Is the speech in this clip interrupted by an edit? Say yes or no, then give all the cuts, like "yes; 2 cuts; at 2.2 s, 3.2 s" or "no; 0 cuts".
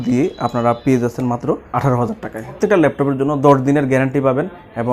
yes; 2 cuts; at 1.6 s, 2.6 s